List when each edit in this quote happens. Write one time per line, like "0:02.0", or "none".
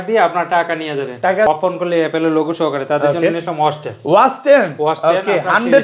0:01.5

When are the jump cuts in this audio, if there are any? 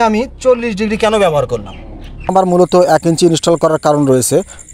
0:02.3

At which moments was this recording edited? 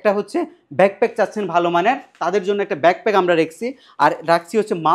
none

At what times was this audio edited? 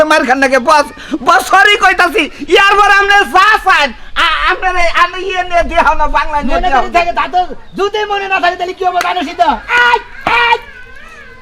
none

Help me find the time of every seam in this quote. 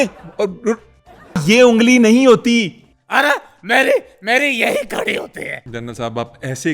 0:01.4
0:05.6

